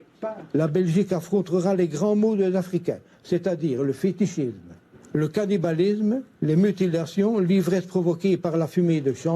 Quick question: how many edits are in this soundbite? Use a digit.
1